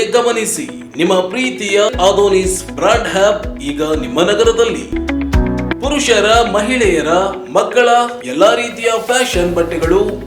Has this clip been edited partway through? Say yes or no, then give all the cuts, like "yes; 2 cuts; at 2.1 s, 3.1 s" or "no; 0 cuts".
no; 0 cuts